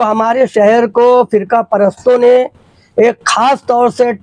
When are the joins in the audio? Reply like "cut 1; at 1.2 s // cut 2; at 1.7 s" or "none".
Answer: none

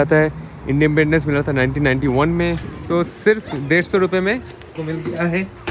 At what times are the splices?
cut 1; at 2.7 s // cut 2; at 4.8 s

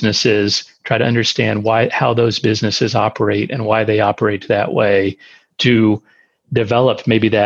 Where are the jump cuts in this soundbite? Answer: none

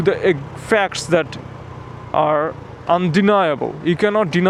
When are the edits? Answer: none

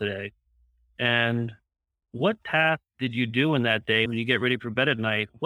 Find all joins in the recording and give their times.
cut 1; at 4.1 s

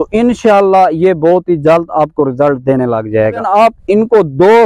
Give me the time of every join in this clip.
cut 1; at 3.4 s

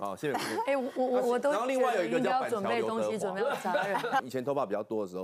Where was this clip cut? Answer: cut 1; at 4.2 s

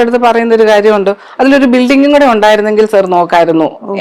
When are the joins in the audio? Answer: none

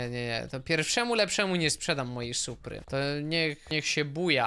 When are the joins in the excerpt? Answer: cut 1; at 2.7 s // cut 2; at 3.6 s

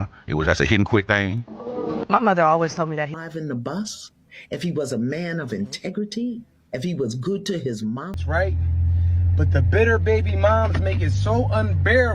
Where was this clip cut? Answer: cut 1; at 3.1 s // cut 2; at 8.1 s

